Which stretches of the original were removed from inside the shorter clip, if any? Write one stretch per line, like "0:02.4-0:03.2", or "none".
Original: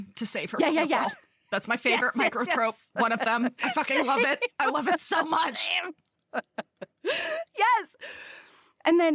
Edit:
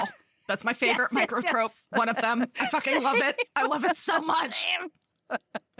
none